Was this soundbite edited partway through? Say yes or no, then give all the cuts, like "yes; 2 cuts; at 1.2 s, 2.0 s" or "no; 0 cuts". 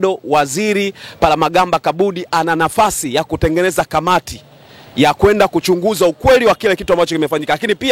no; 0 cuts